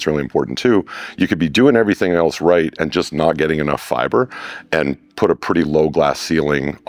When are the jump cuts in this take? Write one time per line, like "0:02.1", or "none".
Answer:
none